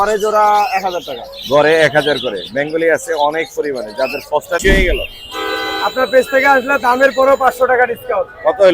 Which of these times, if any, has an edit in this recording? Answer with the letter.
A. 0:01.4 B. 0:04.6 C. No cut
B